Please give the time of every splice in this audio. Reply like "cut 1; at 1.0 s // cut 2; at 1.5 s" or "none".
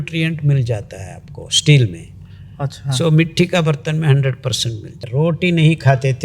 cut 1; at 5.0 s